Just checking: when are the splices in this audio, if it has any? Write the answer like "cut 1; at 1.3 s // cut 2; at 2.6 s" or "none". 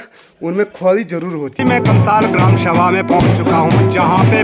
cut 1; at 1.5 s